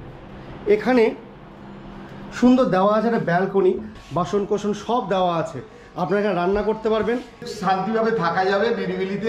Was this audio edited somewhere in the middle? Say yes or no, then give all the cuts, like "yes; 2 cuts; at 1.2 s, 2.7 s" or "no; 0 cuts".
yes; 2 cuts; at 4.0 s, 7.5 s